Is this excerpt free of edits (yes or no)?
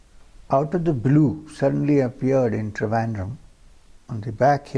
yes